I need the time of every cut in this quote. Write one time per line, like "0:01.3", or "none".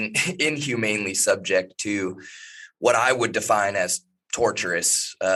none